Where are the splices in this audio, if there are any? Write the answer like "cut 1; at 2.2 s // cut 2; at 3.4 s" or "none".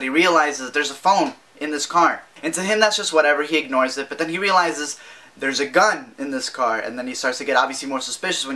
none